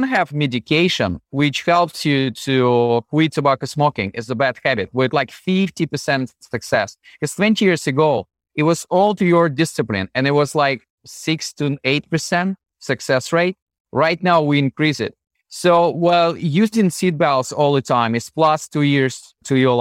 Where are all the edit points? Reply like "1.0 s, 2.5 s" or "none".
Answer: 1.2 s